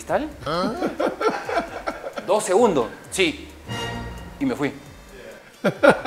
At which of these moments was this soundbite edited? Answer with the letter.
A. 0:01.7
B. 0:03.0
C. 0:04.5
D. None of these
D